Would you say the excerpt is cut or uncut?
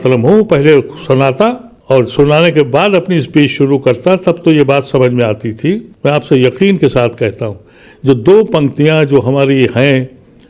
cut